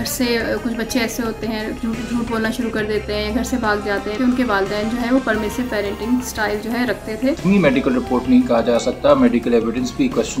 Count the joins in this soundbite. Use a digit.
2